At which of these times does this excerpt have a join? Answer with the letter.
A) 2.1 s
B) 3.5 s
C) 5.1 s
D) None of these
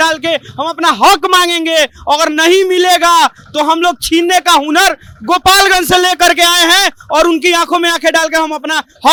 D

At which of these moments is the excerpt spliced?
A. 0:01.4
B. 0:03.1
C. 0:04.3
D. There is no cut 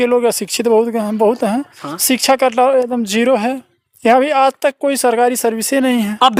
D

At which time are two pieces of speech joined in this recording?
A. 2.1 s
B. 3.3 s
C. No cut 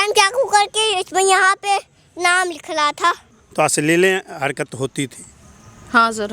B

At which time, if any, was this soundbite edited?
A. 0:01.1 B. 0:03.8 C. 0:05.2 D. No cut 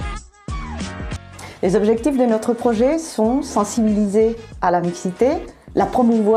D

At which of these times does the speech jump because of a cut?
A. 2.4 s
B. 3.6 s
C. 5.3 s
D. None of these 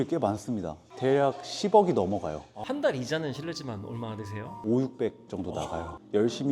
D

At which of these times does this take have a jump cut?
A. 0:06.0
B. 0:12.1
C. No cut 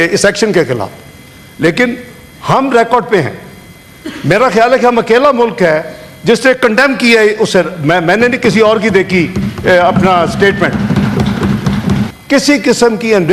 B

